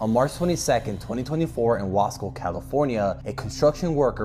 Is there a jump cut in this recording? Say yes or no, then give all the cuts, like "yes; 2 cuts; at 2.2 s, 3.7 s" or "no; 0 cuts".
no; 0 cuts